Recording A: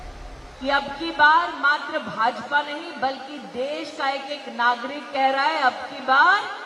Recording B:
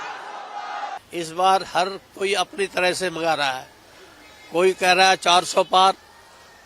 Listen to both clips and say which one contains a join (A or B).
B